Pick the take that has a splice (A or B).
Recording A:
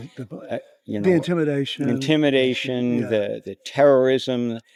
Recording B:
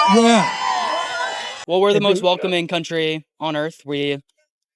B